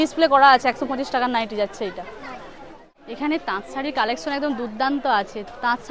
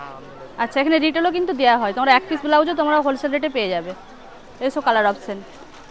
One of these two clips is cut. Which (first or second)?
first